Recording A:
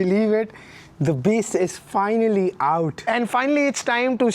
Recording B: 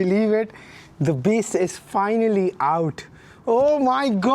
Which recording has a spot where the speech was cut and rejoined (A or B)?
A